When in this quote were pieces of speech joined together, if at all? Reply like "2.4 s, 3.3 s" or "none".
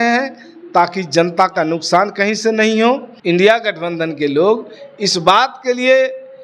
3.1 s